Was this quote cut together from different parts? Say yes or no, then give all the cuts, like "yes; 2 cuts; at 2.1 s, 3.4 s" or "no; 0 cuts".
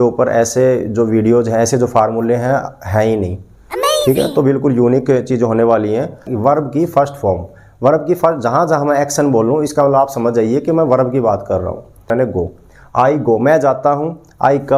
yes; 2 cuts; at 6.3 s, 12.1 s